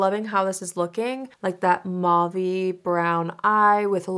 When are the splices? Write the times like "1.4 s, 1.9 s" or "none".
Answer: 1.3 s